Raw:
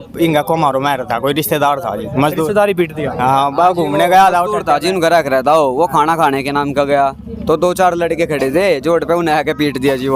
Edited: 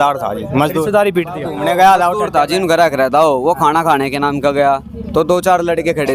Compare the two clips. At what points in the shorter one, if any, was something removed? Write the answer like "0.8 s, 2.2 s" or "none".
1.5 s

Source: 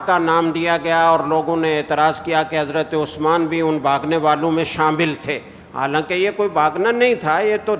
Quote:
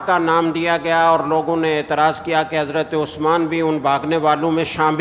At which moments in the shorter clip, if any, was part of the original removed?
none

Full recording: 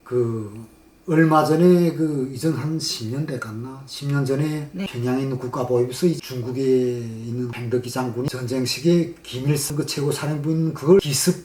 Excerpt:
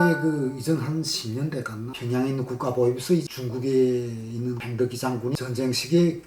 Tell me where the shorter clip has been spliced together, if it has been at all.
2.0 s

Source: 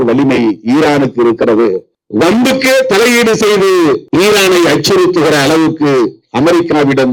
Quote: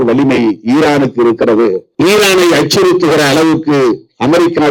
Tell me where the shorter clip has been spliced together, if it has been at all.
1.9 s

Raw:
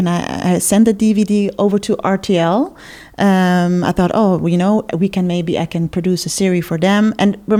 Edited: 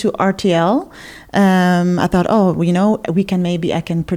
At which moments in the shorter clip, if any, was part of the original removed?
none

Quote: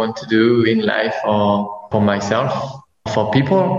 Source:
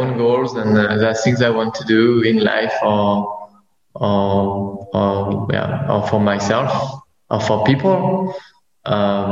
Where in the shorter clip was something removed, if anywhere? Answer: 1.9 s, 3.1 s

